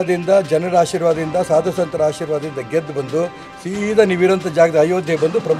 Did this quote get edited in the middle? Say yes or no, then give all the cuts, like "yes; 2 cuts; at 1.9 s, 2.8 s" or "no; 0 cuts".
no; 0 cuts